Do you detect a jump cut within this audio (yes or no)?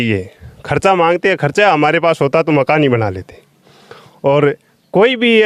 no